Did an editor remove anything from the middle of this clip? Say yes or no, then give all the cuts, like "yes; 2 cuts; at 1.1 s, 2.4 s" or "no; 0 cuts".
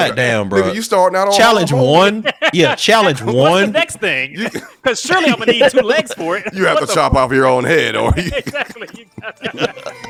no; 0 cuts